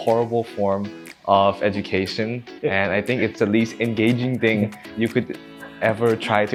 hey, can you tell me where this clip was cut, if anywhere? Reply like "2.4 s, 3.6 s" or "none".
none